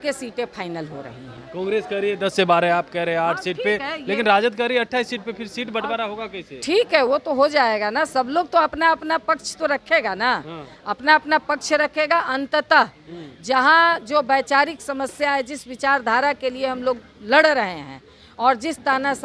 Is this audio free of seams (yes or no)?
yes